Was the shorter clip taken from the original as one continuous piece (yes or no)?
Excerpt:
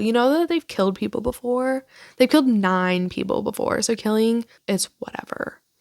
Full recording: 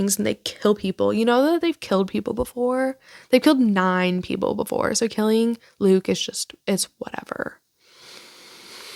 no